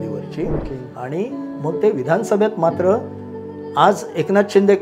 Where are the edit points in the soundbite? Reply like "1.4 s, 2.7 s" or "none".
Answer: none